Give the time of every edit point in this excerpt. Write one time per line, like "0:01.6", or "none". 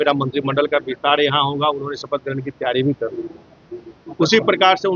none